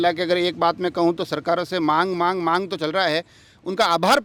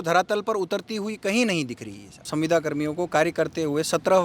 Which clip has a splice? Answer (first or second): second